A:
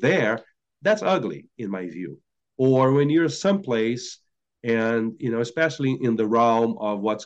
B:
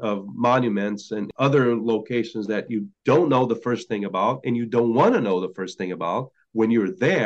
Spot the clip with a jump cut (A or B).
B